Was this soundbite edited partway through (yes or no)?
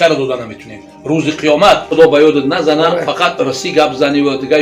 yes